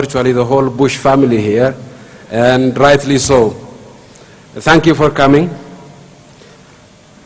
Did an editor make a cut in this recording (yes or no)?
yes